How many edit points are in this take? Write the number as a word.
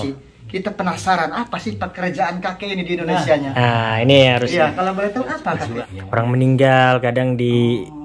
one